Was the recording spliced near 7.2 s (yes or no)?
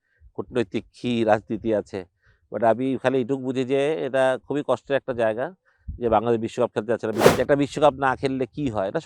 yes